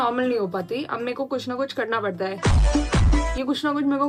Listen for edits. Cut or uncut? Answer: uncut